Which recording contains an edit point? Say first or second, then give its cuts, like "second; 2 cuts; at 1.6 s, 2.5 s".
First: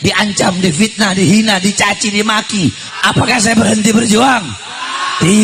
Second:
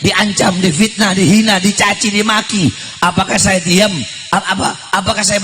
first; 1 cut; at 2.9 s